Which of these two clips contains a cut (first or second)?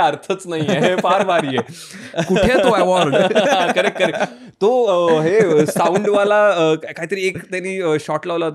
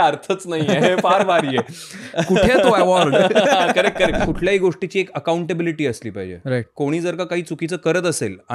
second